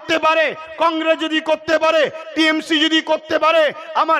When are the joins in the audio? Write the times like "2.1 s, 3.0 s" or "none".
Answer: none